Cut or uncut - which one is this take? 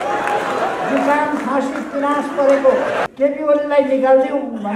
cut